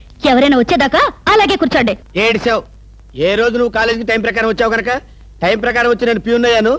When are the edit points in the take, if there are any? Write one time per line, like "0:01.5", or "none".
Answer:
0:02.0